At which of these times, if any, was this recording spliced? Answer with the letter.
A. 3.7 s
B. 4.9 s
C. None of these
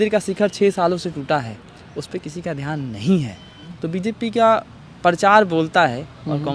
A